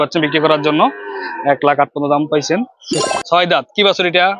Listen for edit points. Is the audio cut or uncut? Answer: cut